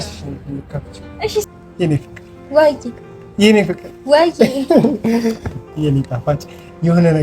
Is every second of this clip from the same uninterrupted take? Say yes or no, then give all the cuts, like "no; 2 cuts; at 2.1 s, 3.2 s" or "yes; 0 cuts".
no; 1 cut; at 1.6 s